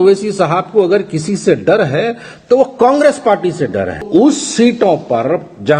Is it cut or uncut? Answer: cut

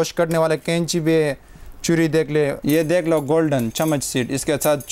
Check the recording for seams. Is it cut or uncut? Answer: cut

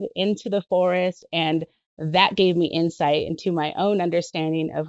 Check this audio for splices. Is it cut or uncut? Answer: cut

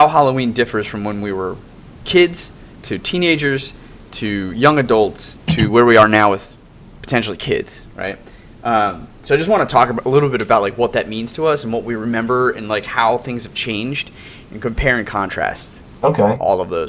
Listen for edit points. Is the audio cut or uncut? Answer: cut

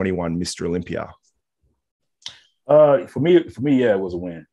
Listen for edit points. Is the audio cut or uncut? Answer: uncut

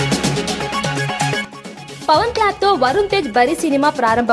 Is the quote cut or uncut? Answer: uncut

